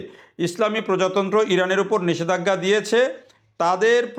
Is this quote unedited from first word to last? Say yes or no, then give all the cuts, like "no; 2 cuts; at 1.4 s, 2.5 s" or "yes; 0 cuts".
yes; 0 cuts